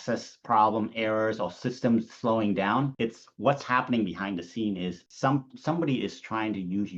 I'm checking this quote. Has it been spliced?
no; 0 cuts

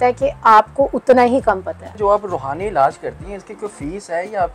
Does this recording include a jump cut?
yes; 1 cut; at 2.0 s

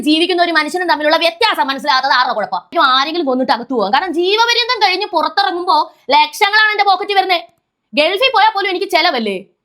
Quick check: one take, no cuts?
no; 1 cut; at 2.7 s

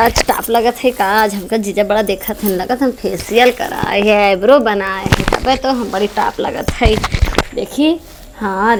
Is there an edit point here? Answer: no; 0 cuts

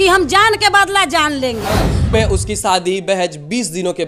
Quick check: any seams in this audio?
yes; 1 cut; at 2.1 s

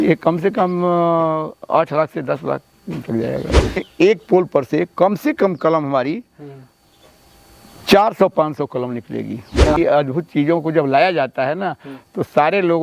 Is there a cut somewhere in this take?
yes; 2 cuts; at 3.8 s, 9.8 s

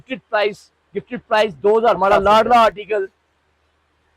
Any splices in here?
yes; 1 cut; at 2.0 s

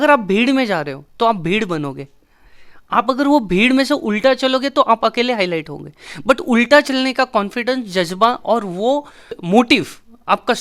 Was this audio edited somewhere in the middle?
no; 0 cuts

